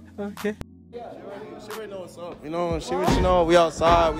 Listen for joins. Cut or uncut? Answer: cut